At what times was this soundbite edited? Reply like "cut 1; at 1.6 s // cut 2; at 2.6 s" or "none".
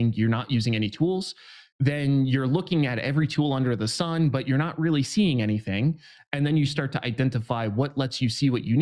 none